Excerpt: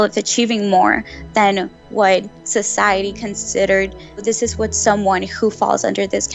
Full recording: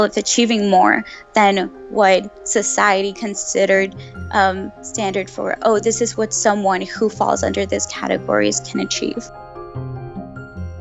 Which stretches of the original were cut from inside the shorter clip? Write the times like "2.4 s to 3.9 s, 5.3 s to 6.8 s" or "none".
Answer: 4.2 s to 5.8 s